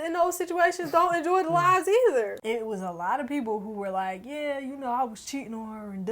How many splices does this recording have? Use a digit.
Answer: 1